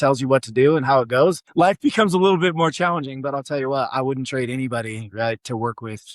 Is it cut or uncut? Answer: cut